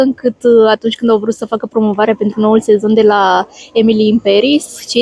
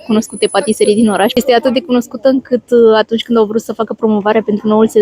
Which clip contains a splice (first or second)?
second